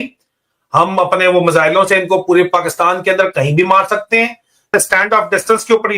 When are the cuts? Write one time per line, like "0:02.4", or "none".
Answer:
0:04.7